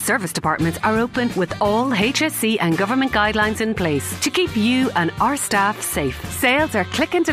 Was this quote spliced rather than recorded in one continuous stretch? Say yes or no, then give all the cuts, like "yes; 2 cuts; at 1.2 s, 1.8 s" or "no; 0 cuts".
no; 0 cuts